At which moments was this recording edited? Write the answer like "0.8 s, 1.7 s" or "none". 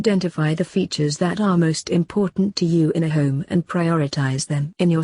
none